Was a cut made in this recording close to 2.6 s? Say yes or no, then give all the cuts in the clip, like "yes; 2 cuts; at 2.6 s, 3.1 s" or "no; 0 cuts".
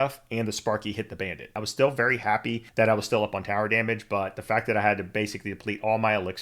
yes; 2 cuts; at 1.6 s, 2.6 s